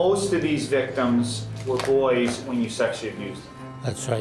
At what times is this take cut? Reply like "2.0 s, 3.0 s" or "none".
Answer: 1.6 s